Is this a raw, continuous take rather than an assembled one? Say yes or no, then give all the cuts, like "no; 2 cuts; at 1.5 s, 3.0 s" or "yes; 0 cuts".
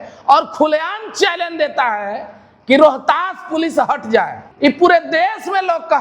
no; 1 cut; at 4.4 s